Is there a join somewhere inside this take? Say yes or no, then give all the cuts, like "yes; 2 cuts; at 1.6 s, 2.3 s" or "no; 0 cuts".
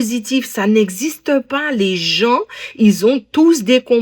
no; 0 cuts